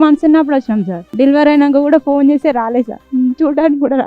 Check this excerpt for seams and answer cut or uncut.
cut